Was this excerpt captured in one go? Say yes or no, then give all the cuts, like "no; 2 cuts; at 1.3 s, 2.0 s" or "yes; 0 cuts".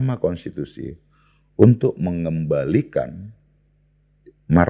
yes; 0 cuts